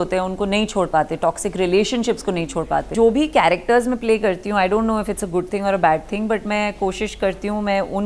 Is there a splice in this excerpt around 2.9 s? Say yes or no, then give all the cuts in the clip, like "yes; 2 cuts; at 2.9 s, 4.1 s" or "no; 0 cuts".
yes; 1 cut; at 2.9 s